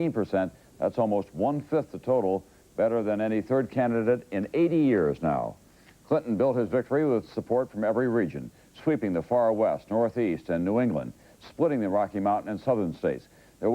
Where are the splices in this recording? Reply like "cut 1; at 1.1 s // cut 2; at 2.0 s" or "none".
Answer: cut 1; at 2.5 s